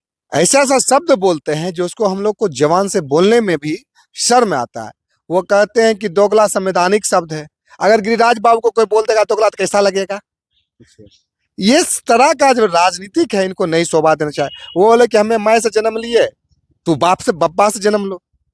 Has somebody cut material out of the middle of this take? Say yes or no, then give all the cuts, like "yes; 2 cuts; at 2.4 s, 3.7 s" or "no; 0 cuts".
no; 0 cuts